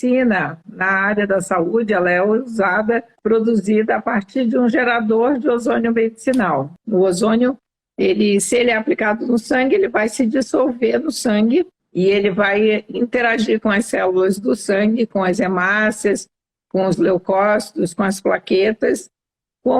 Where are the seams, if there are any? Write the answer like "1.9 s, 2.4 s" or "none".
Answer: 3.1 s, 6.7 s, 11.8 s